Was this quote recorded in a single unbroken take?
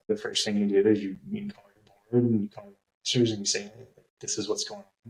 yes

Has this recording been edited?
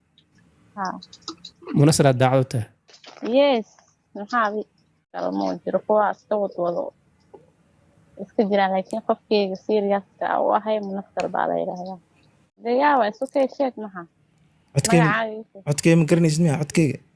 yes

